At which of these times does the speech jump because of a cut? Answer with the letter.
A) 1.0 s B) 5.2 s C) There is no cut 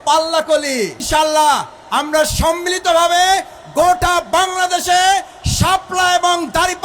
A